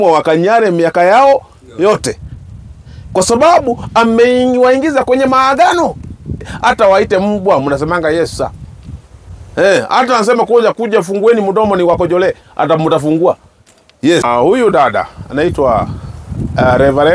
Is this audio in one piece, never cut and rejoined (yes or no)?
no